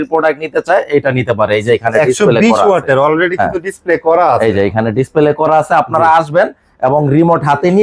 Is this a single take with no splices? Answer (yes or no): yes